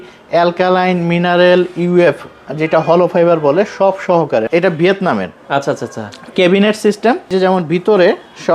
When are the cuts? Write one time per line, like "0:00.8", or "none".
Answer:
0:04.5
0:07.3